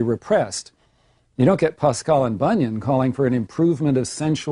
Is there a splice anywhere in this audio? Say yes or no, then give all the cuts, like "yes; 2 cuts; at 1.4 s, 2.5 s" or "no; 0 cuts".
no; 0 cuts